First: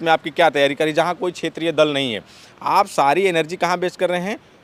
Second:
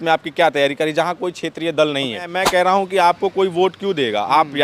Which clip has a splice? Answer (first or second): second